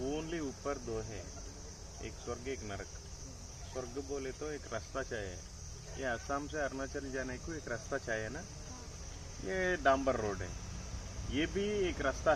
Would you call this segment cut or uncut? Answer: uncut